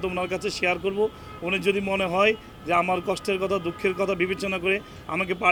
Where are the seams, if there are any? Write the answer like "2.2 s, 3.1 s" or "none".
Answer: none